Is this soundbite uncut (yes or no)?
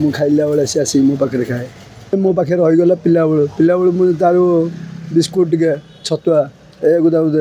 no